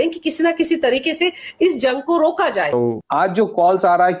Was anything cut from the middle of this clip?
yes; 1 cut; at 2.7 s

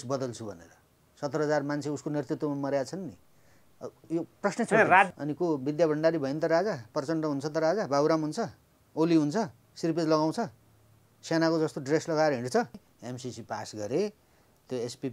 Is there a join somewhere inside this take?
yes; 2 cuts; at 5.2 s, 12.9 s

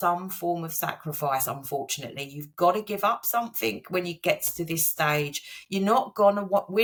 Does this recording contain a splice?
no; 0 cuts

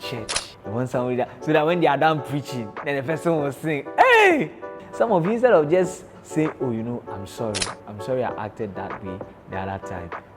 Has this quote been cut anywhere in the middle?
yes; 1 cut; at 4.7 s

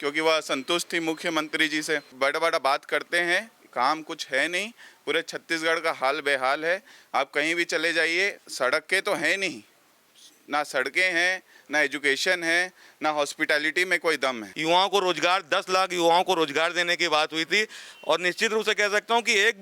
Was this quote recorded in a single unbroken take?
no; 3 cuts; at 2.1 s, 8.4 s, 14.5 s

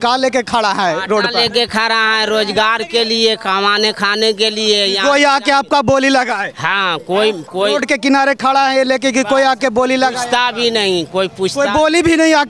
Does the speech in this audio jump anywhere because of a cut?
no; 0 cuts

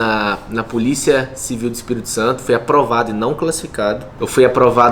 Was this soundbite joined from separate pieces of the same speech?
no; 0 cuts

